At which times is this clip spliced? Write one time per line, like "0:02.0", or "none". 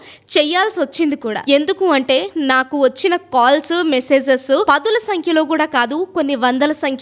0:01.4
0:04.6